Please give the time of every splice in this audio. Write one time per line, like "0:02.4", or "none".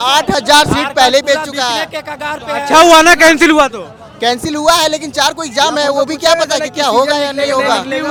none